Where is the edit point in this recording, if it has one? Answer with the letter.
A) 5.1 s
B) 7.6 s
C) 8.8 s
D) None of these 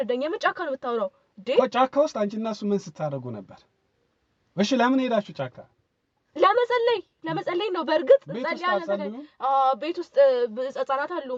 D